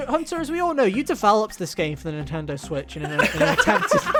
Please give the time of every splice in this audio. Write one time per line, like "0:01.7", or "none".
none